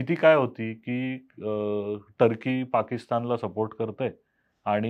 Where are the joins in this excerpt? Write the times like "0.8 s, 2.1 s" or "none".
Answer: none